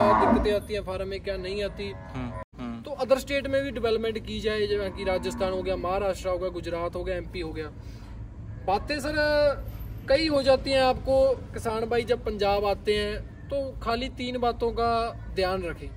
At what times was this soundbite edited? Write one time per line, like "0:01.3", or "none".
0:02.5